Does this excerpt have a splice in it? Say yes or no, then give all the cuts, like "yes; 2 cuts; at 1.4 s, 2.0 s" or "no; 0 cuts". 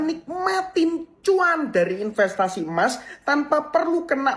no; 0 cuts